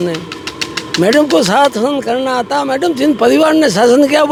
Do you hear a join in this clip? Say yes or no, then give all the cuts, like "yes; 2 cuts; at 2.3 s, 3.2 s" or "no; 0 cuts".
no; 0 cuts